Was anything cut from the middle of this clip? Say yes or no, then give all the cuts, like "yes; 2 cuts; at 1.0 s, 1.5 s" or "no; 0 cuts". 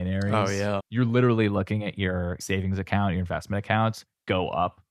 yes; 2 cuts; at 0.9 s, 2.4 s